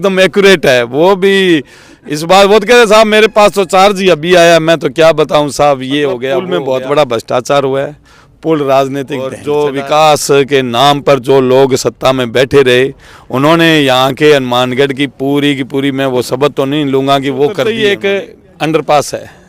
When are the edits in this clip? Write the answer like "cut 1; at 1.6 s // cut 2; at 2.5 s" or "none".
cut 1; at 6.5 s // cut 2; at 9.4 s // cut 3; at 17.6 s